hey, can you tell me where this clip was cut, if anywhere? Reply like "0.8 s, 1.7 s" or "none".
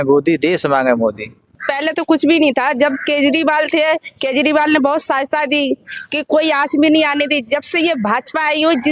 1.6 s